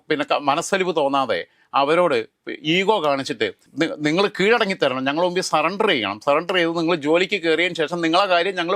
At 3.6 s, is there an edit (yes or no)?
yes